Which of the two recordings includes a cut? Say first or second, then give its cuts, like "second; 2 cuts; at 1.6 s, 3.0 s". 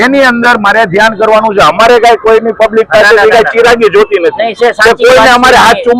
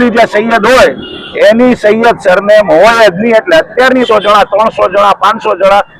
second; 1 cut; at 4.1 s